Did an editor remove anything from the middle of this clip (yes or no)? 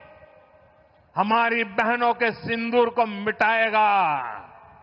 no